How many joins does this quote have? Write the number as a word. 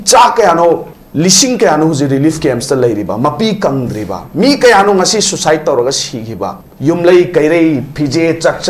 two